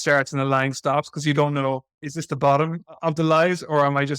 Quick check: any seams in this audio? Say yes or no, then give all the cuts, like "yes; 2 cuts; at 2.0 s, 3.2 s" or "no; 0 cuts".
yes; 1 cut; at 2.1 s